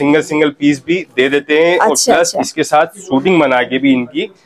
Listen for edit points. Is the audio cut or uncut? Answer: uncut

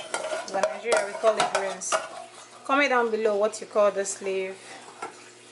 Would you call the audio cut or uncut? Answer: uncut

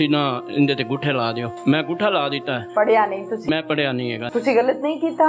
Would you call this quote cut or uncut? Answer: cut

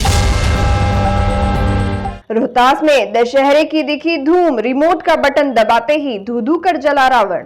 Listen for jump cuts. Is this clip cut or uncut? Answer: cut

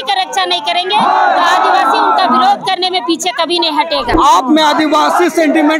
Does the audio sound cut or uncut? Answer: cut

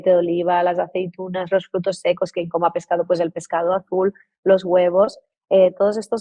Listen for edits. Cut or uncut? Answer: uncut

